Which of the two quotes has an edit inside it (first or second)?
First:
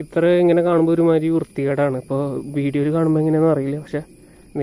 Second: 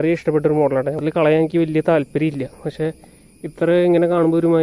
second